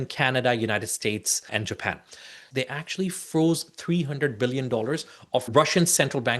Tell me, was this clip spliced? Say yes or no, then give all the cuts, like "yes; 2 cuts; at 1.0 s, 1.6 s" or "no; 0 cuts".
yes; 3 cuts; at 1.4 s, 2.5 s, 5.5 s